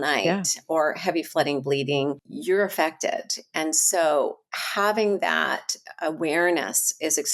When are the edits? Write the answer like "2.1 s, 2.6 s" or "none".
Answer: 2.3 s